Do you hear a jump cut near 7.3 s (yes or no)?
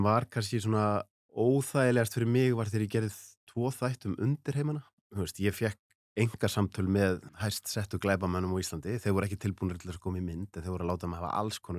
yes